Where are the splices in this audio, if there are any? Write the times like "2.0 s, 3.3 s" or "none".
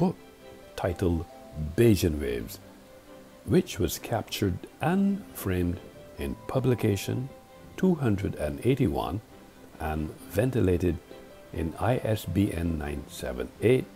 11.5 s